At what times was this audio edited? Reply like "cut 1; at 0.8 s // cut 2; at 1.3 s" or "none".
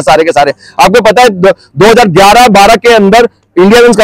none